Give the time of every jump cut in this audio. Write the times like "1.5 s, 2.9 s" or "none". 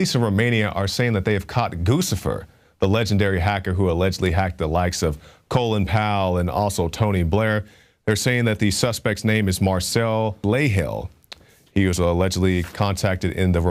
none